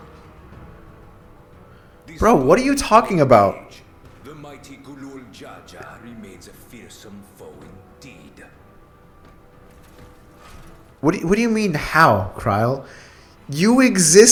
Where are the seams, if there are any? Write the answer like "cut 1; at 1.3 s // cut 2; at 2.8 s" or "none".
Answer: none

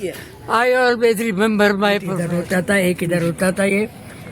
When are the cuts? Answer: cut 1; at 2.2 s

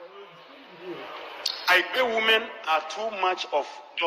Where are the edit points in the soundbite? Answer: none

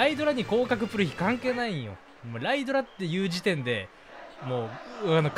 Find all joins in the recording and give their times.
none

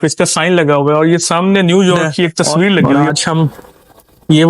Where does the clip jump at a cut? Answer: cut 1; at 3.1 s

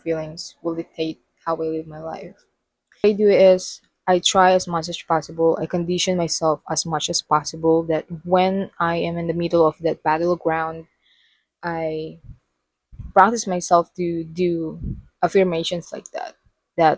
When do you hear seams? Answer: cut 1; at 3.0 s

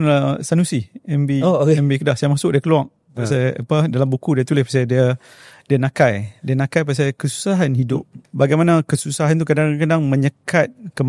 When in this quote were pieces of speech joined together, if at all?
cut 1; at 8.2 s

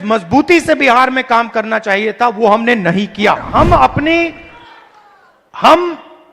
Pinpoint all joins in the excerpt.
cut 1; at 3.5 s

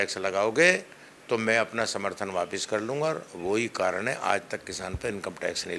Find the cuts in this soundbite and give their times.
none

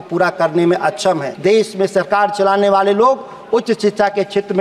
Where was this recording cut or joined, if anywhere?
cut 1; at 1.4 s

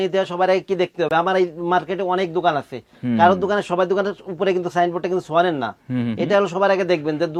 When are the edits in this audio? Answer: none

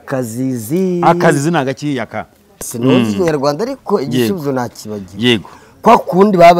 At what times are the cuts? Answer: cut 1; at 2.7 s

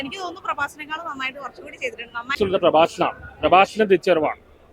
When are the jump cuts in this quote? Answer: cut 1; at 2.4 s

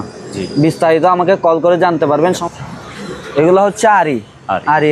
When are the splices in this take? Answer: cut 1; at 2.4 s

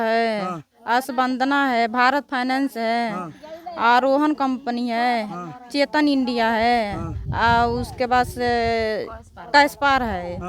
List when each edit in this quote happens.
none

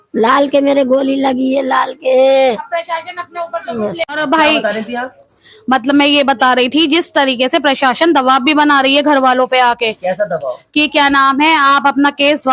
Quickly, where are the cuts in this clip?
cut 1; at 4.1 s

